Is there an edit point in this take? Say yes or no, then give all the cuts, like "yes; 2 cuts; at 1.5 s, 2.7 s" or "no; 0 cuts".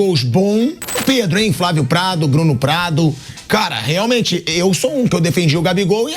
yes; 1 cut; at 1.0 s